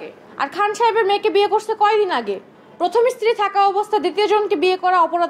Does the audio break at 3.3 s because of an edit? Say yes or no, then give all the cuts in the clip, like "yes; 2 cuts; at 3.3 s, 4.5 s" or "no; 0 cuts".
no; 0 cuts